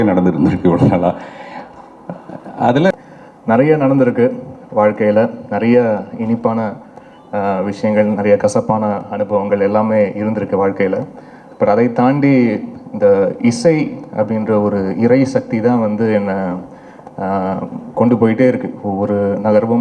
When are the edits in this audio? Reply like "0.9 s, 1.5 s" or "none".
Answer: 2.9 s